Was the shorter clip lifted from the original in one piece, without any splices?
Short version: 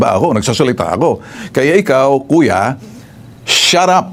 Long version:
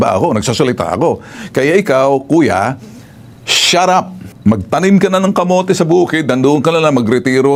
yes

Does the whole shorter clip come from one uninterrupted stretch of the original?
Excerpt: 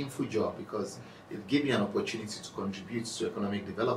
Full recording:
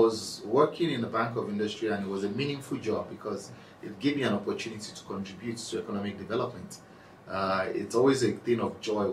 yes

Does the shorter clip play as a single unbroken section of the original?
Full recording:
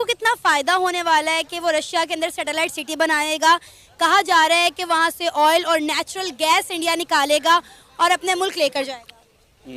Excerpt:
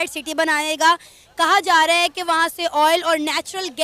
yes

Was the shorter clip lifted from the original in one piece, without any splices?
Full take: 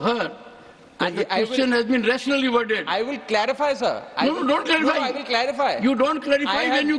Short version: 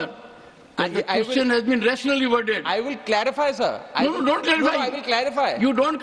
yes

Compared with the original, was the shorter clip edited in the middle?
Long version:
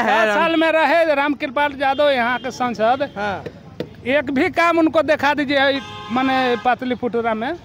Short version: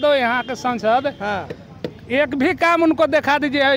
no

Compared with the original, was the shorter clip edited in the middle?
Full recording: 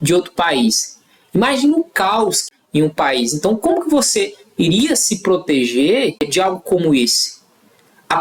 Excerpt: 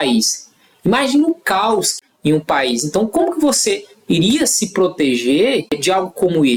no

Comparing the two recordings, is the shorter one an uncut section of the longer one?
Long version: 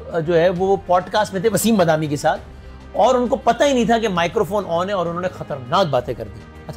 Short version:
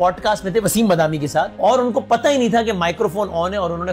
no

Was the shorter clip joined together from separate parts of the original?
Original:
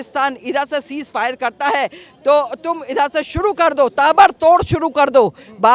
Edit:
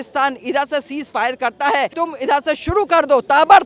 yes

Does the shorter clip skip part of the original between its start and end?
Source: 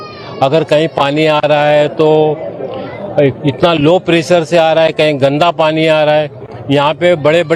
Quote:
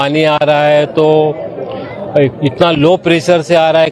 no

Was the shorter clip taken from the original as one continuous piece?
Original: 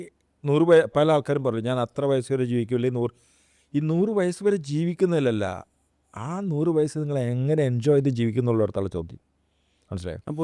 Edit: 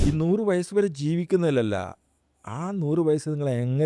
yes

